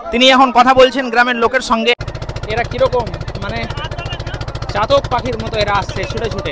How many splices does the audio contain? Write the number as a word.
one